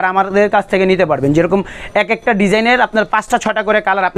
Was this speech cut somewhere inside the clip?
no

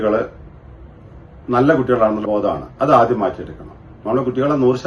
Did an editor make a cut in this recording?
yes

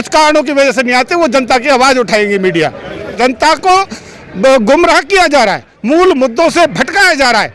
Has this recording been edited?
yes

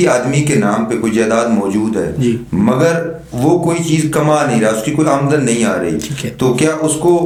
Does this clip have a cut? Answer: no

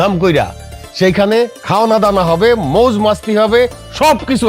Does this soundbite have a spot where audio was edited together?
yes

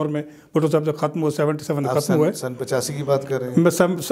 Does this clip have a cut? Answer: no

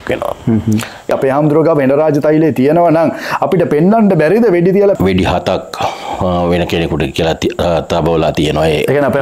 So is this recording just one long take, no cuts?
no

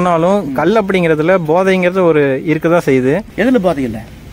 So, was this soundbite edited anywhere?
yes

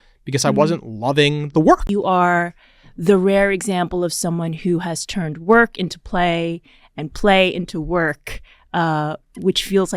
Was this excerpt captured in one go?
no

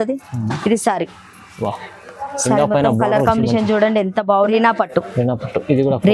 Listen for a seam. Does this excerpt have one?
yes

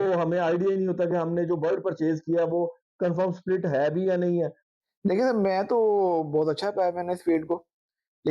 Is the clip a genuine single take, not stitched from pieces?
no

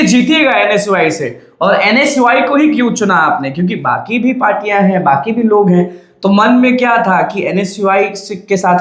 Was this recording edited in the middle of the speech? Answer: no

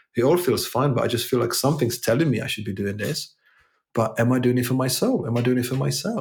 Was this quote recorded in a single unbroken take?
yes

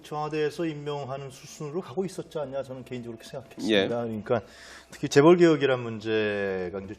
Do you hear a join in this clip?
no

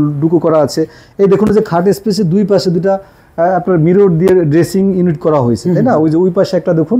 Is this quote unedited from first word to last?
yes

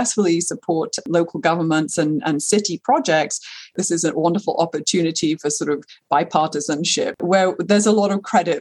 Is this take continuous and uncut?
no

